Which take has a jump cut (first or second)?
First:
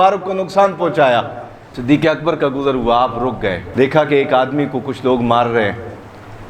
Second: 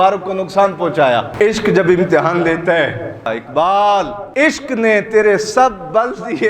second